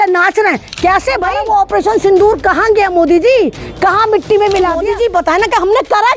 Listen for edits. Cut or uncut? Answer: cut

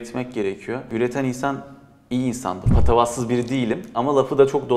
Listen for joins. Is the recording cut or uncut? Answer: cut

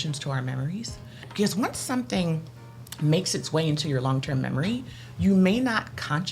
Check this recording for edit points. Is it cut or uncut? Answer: cut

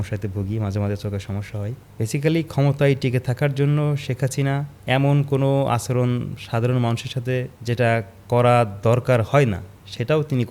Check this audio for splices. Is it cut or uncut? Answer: cut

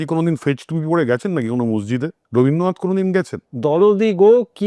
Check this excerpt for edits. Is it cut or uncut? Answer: cut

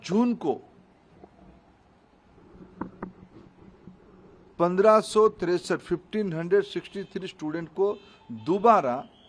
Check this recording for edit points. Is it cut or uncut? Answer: uncut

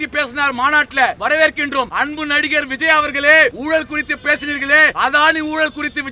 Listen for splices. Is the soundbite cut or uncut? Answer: cut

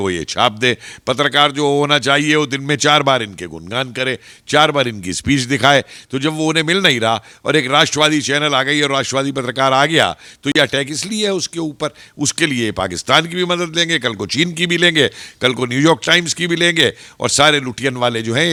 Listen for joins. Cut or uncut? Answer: uncut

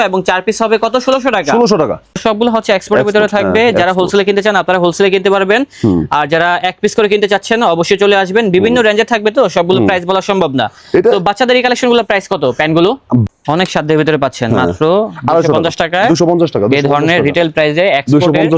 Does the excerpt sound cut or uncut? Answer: cut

